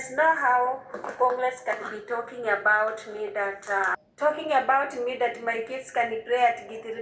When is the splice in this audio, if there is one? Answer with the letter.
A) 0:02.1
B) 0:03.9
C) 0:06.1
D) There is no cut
B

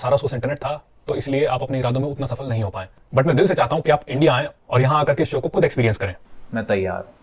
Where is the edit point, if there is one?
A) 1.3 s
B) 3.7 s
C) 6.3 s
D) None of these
C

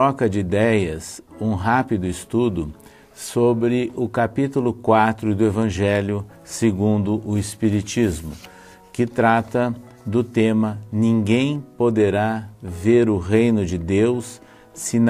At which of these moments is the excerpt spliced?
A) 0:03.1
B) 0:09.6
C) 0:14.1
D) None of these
B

